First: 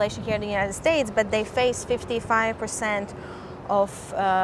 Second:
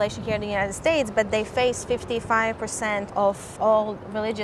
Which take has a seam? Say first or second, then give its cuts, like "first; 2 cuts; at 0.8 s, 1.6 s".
second; 1 cut; at 3.5 s